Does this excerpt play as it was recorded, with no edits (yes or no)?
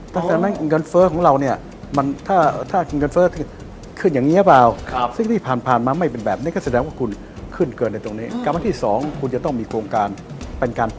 yes